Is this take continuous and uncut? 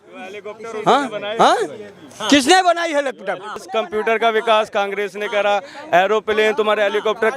no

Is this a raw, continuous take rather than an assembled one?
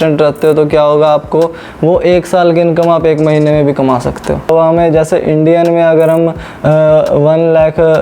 no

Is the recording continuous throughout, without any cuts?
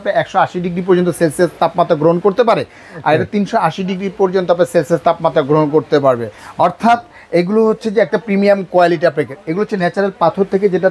yes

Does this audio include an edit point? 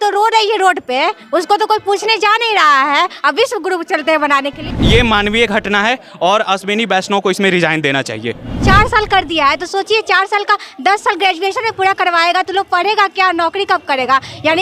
yes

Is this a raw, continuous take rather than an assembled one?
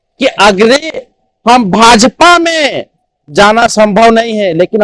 yes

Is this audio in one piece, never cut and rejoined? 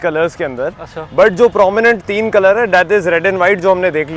yes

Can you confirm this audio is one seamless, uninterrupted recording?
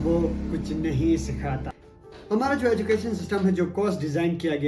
no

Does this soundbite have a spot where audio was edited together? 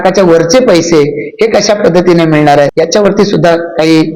yes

